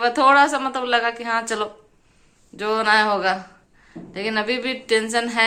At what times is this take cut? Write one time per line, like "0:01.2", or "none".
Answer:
none